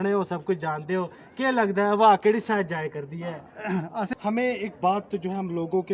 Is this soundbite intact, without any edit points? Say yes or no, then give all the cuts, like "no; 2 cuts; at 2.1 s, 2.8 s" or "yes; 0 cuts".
no; 1 cut; at 4.1 s